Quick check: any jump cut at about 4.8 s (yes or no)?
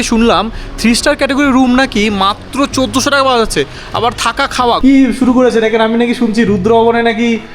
yes